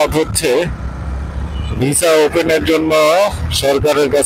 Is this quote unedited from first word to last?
yes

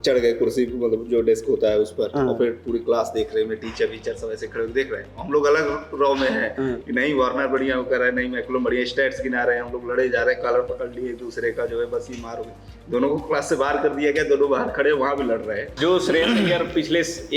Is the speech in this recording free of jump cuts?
no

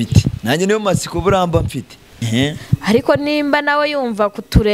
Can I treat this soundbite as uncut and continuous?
no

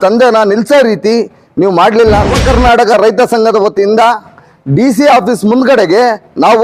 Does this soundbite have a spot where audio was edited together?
yes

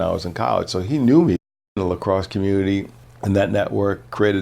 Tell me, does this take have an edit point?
yes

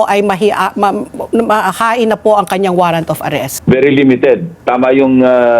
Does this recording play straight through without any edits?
no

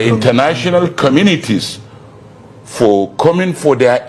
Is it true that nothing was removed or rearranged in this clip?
yes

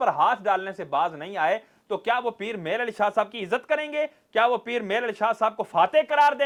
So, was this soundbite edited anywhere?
no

